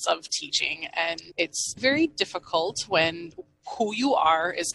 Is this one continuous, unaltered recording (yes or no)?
no